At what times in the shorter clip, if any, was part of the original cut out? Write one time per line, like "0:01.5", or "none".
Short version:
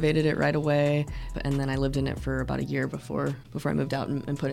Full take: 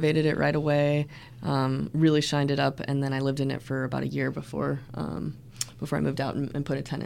0:01.4
0:03.4